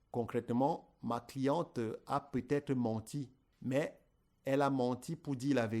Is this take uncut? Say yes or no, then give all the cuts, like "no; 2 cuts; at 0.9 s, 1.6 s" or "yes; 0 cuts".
no; 1 cut; at 3.4 s